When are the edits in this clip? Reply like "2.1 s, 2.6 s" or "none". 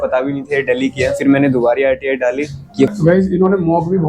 2.9 s